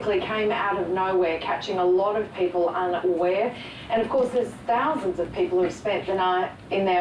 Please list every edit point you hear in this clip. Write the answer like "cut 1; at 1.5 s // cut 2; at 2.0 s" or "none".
cut 1; at 1.4 s